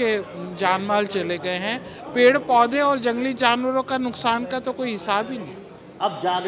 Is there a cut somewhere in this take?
yes; 1 cut; at 5.6 s

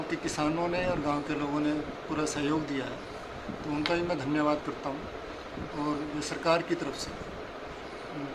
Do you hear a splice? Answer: no; 0 cuts

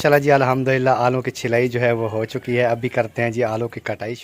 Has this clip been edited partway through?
no; 0 cuts

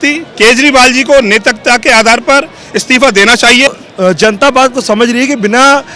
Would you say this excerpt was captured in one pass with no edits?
no; 1 cut; at 3.7 s

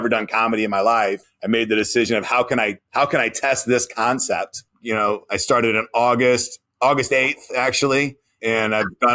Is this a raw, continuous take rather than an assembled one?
no; 2 cuts; at 4.7 s, 8.3 s

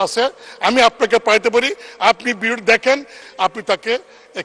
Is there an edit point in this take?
yes; 1 cut; at 3.2 s

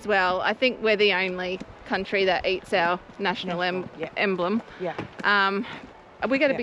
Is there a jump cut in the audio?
no; 0 cuts

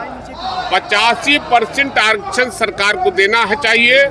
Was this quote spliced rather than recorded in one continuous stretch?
no; 0 cuts

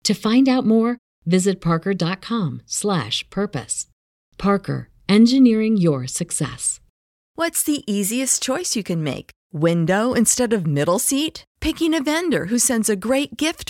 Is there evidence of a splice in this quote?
yes; 1 cut; at 7.2 s

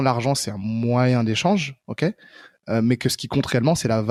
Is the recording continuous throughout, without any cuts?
yes; 0 cuts

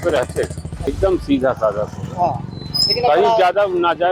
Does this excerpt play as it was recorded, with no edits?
no; 1 cut; at 0.9 s

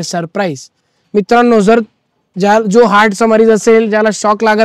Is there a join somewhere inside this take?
no; 0 cuts

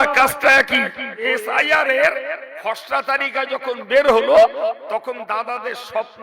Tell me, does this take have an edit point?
yes; 1 cut; at 1.2 s

